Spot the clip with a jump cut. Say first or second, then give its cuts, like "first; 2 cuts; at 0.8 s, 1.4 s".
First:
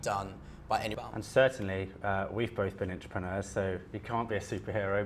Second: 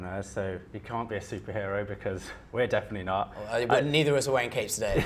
first; 1 cut; at 0.9 s